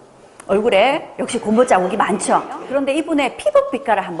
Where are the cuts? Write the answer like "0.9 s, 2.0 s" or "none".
2.6 s